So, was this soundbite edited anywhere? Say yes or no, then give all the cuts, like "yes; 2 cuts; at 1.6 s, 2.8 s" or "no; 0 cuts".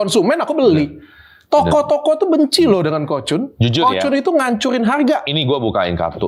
no; 0 cuts